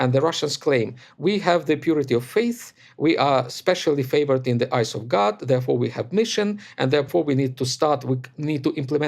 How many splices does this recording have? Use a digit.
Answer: 1